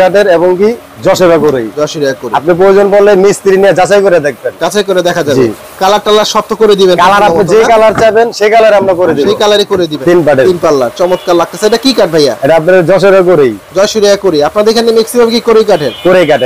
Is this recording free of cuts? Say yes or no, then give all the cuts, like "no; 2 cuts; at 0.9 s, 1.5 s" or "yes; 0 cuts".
no; 1 cut; at 10.0 s